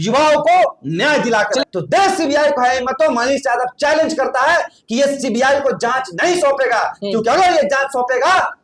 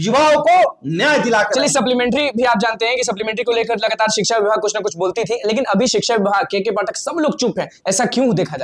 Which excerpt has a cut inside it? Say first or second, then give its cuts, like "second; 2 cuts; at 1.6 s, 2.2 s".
first; 1 cut; at 1.7 s